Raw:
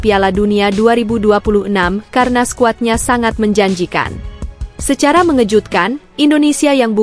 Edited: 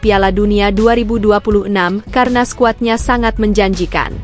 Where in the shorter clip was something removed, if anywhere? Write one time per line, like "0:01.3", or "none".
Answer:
none